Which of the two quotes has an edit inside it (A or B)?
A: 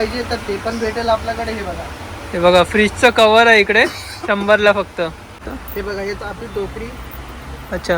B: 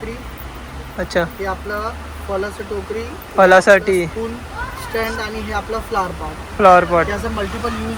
A